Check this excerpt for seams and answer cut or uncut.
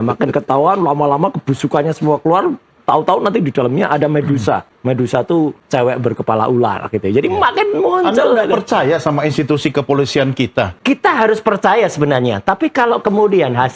cut